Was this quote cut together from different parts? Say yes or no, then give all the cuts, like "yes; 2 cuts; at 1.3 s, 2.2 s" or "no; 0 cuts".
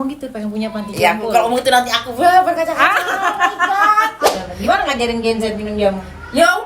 yes; 1 cut; at 4.4 s